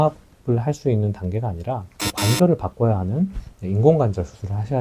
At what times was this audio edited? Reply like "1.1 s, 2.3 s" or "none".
none